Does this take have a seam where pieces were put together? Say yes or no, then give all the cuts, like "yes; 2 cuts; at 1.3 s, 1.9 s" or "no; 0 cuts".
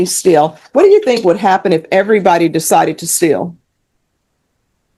no; 0 cuts